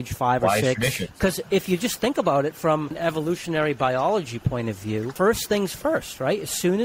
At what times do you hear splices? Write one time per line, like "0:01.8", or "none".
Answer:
0:01.1
0:03.0
0:05.1